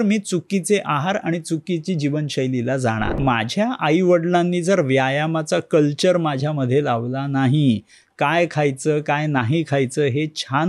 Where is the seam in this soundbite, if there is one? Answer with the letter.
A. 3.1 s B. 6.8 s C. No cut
A